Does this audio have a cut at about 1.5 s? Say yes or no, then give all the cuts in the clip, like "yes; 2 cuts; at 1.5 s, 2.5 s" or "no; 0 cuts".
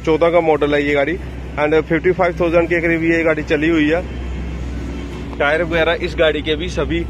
no; 0 cuts